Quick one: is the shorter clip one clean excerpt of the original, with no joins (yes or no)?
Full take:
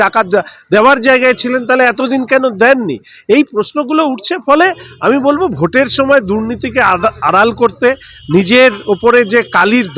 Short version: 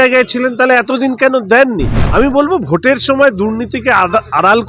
no